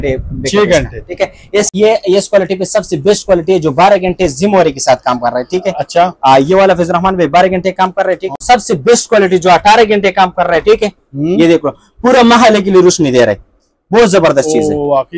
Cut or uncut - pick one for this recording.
cut